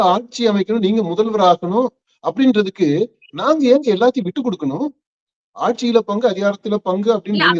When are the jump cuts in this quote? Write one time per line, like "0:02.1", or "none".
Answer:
none